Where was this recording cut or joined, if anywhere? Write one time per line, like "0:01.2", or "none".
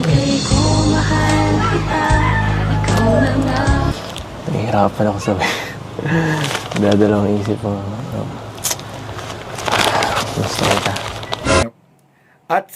0:11.6